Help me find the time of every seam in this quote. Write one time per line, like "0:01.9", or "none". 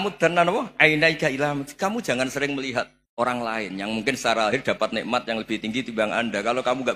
0:03.0